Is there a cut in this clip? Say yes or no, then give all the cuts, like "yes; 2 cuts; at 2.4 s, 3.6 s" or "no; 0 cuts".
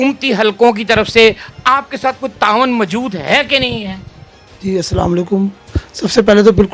no; 0 cuts